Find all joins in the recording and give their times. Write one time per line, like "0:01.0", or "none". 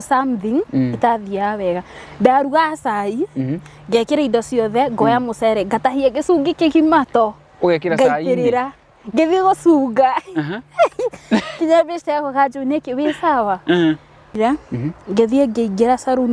0:14.3